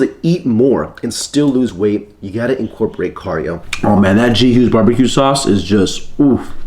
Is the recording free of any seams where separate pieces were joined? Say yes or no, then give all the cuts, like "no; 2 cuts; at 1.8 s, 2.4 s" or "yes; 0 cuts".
no; 1 cut; at 3.6 s